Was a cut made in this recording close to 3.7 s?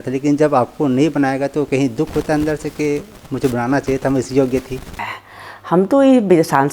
no; 1 cut; at 5.0 s

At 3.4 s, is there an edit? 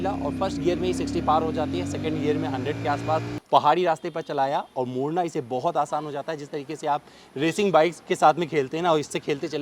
yes; 1 cut; at 3.4 s

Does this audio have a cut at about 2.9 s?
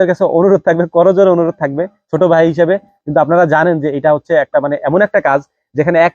yes; 1 cut; at 2.9 s

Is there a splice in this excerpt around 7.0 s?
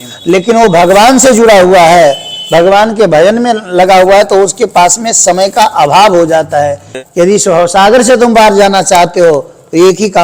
yes; 1 cut; at 7.0 s

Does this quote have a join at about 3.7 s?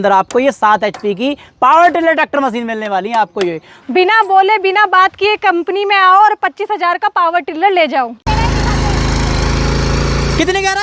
yes; 2 cuts; at 3.7 s, 8.2 s

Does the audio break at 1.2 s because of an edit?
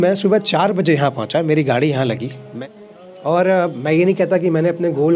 no; 1 cut; at 2.5 s

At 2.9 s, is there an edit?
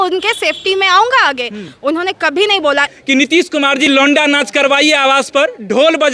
yes; 1 cut; at 2.9 s

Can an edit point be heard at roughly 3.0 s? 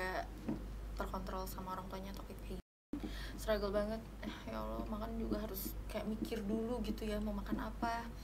yes; 1 cut; at 3.0 s

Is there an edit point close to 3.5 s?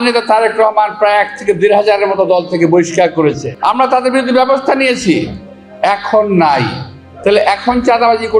yes; 1 cut; at 3.5 s

